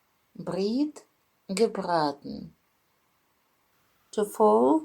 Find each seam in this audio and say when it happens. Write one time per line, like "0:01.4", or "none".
0:03.4